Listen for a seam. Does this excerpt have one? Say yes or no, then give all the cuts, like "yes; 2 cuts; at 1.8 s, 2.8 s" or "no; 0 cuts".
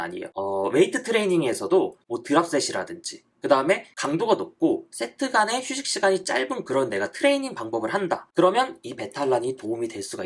yes; 1 cut; at 8.3 s